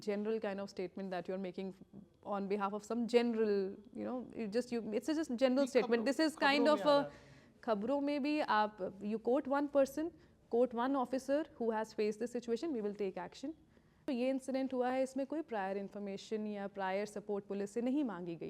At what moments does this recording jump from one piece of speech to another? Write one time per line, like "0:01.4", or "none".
0:14.1